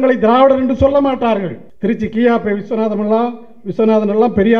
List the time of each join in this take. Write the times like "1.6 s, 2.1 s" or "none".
1.6 s